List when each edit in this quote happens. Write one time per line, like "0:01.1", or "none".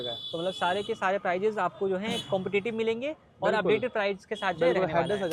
none